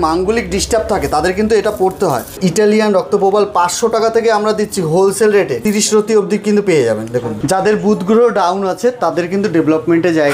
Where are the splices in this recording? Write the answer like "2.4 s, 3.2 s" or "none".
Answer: 2.4 s, 5.6 s, 7.3 s